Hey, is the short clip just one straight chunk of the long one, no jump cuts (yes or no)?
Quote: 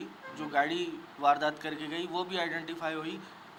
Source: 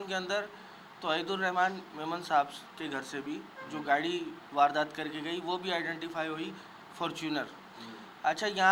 yes